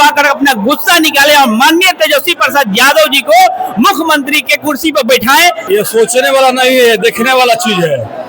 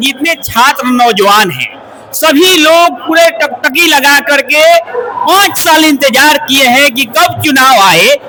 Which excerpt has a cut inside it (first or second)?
first